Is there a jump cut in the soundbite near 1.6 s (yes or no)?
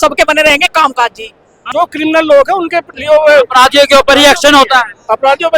yes